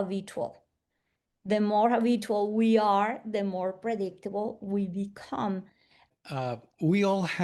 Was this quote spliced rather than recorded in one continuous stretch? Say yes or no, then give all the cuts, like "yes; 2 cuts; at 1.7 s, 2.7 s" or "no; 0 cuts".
yes; 1 cut; at 6.0 s